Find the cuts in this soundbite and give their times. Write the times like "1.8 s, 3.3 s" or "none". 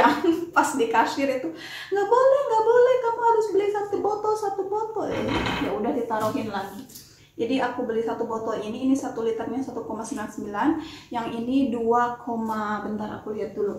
none